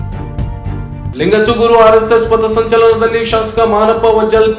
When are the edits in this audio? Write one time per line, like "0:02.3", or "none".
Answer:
none